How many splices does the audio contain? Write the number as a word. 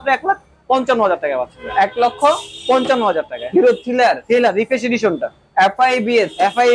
zero